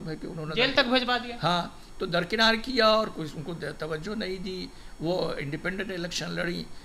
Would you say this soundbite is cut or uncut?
uncut